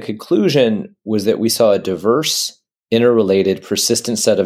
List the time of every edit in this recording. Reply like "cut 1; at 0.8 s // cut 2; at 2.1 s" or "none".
none